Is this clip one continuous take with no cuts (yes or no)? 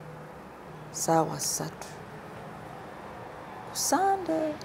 yes